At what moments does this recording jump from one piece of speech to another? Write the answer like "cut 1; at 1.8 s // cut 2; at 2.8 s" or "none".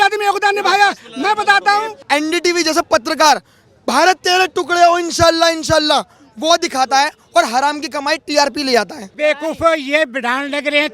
cut 1; at 2.0 s // cut 2; at 9.1 s